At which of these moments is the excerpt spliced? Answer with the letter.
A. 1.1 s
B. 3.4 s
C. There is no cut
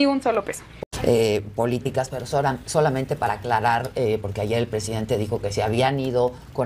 A